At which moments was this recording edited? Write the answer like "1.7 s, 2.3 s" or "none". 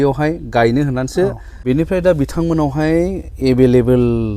1.5 s